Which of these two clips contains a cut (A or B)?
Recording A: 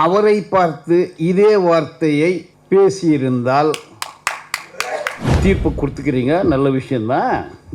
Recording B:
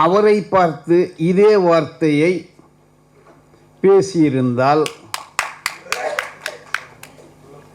A